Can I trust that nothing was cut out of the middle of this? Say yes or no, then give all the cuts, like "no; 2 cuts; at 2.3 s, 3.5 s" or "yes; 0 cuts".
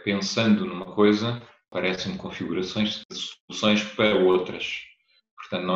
no; 1 cut; at 3.0 s